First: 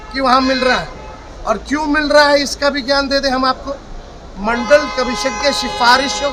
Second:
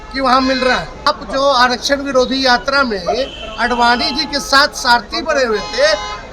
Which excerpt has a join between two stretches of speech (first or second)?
second